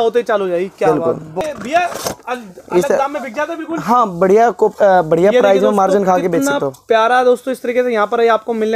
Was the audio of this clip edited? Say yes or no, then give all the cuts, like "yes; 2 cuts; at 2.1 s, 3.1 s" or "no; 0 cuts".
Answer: yes; 1 cut; at 1.4 s